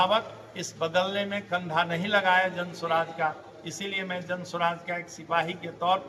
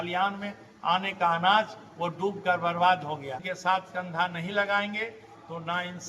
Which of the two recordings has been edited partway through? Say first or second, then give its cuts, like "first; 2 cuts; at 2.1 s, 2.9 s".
second; 1 cut; at 3.5 s